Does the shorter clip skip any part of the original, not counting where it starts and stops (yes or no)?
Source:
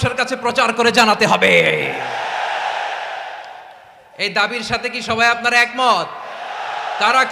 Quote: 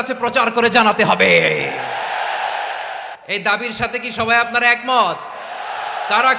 yes